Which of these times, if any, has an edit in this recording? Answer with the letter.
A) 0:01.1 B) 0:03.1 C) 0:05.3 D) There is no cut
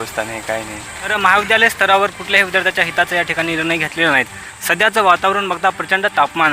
A